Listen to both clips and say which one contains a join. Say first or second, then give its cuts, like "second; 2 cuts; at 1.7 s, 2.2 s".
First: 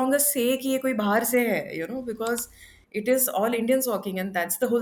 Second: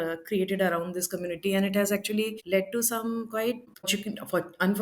second; 2 cuts; at 2.4 s, 3.8 s